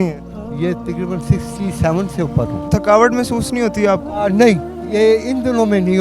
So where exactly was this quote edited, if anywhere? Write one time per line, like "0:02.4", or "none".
0:02.6